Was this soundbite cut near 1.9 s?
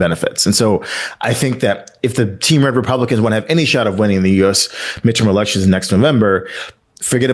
no; 0 cuts

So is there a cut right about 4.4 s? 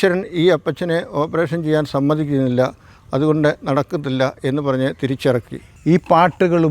no; 1 cut; at 5.7 s

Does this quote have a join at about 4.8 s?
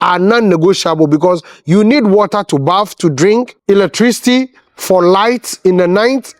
no; 1 cut; at 3.5 s

